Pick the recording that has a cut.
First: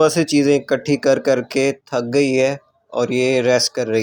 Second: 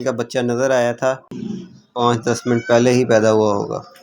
second; 1 cut; at 1.7 s

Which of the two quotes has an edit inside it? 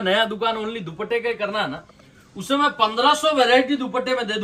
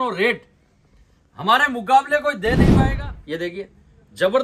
second; 1 cut; at 2.6 s

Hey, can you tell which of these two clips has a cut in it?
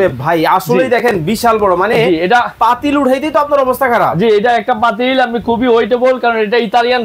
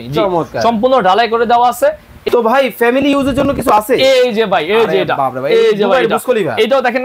second; 1 cut; at 2.2 s

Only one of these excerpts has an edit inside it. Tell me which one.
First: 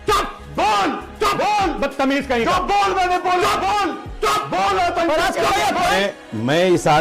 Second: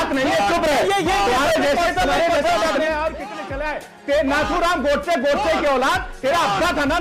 first; 1 cut; at 5.9 s

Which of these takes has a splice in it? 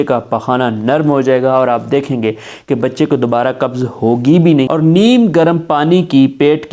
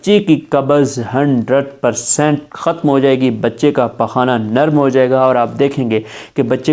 first; 1 cut; at 4.7 s

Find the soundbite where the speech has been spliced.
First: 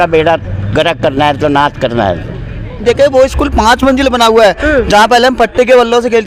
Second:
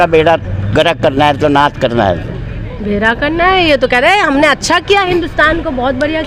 first; 1 cut; at 2.8 s

